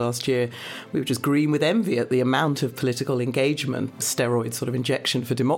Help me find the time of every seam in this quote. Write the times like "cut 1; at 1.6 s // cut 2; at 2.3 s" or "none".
cut 1; at 4.1 s